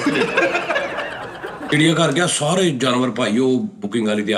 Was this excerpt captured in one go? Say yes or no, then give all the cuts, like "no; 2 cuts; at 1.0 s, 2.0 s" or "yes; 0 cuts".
no; 1 cut; at 1.8 s